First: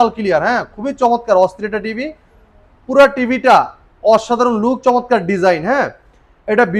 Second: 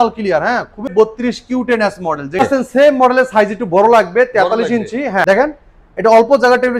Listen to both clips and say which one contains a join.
second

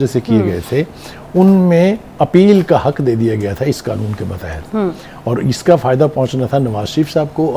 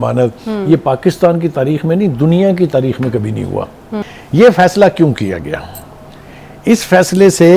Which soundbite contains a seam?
second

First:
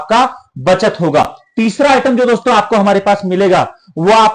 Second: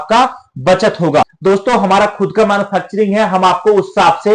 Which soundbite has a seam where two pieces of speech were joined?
second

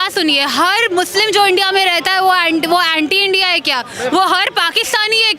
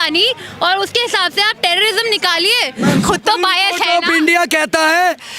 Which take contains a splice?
second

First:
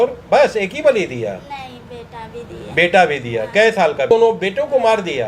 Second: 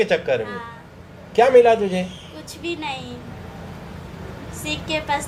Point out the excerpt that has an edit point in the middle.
first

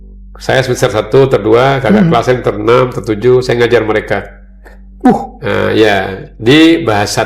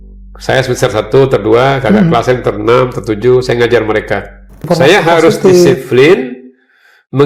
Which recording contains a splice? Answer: second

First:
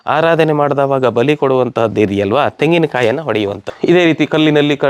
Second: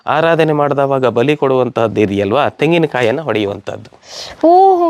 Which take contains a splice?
first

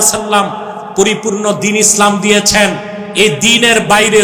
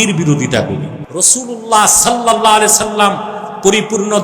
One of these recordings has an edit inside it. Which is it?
second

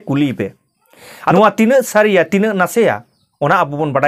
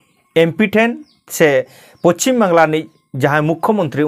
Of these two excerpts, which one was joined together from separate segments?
first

